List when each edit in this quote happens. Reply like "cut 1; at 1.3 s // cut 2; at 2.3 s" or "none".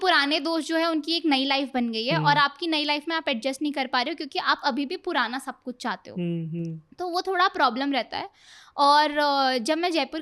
none